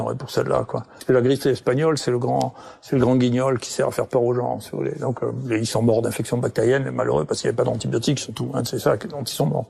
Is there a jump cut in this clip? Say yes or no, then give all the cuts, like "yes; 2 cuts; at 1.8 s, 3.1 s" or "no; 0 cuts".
yes; 1 cut; at 0.9 s